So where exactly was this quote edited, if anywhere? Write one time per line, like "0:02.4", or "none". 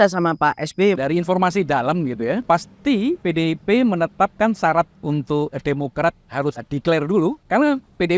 0:01.0
0:02.4
0:03.2
0:06.6
0:07.4